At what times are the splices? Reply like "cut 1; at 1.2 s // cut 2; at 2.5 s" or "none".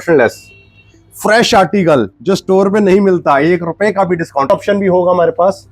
cut 1; at 4.5 s